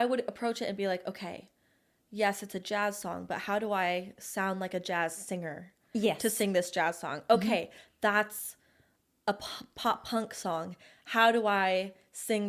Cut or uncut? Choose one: uncut